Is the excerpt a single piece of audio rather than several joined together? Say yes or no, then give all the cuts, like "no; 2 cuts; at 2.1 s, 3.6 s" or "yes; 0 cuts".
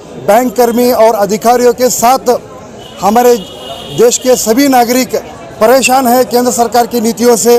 yes; 0 cuts